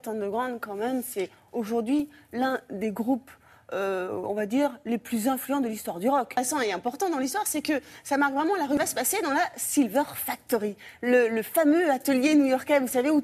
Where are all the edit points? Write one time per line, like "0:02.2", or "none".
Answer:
0:10.3